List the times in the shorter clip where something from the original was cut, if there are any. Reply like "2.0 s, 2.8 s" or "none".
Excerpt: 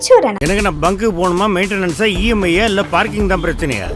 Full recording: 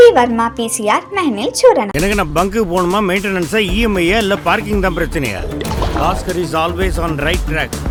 none

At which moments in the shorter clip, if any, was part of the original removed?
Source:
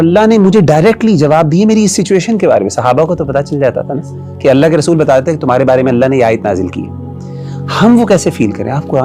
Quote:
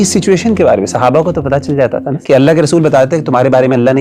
2.1 s

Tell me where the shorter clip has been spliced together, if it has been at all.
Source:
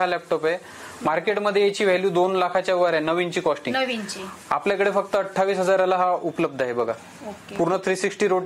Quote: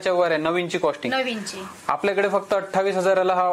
none

